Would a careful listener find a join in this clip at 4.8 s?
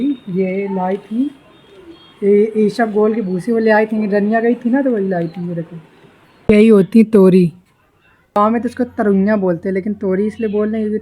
no; 2 cuts; at 6.5 s, 8.4 s

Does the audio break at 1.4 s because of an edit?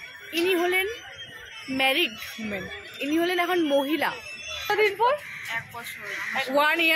no; 1 cut; at 4.7 s

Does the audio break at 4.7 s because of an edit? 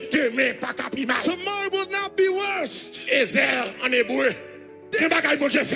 yes; 1 cut; at 4.7 s

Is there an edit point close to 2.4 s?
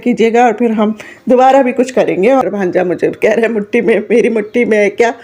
yes; 1 cut; at 2.4 s

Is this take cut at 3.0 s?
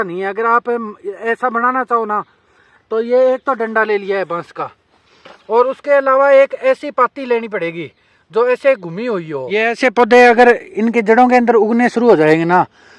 no; 1 cut; at 9.6 s

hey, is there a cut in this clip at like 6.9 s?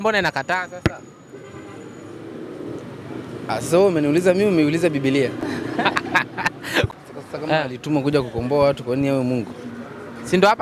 yes; 1 cut; at 6.9 s

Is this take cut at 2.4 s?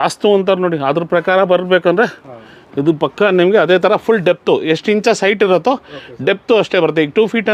no; 0 cuts

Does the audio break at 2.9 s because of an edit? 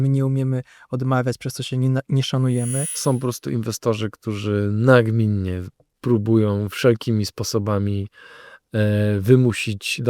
yes; 1 cut; at 2.9 s

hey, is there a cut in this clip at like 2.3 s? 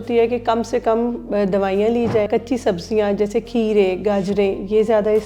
yes; 1 cut; at 2.3 s

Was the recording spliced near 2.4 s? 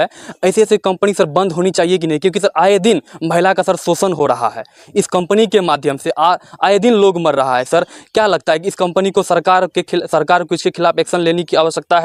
no; 0 cuts

